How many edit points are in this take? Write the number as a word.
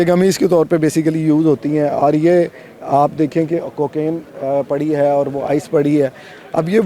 zero